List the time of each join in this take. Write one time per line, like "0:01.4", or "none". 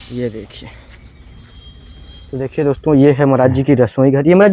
0:02.5